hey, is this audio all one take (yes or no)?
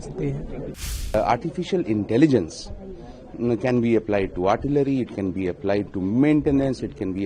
no